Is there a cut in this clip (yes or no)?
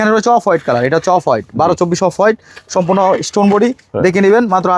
no